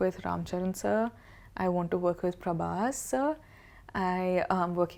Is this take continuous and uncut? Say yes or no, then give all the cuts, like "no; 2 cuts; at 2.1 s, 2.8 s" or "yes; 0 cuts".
yes; 0 cuts